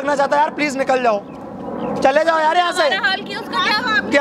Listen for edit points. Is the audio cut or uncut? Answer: uncut